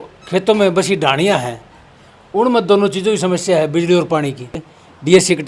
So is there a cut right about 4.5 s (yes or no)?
yes